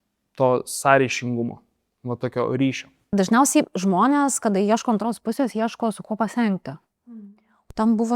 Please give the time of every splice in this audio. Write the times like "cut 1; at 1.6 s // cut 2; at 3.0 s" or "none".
cut 1; at 3.1 s